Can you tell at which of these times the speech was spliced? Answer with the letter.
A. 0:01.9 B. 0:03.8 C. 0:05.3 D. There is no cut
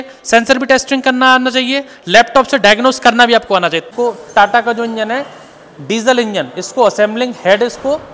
B